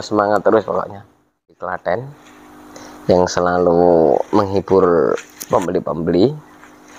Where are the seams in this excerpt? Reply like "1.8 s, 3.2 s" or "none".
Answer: 1.6 s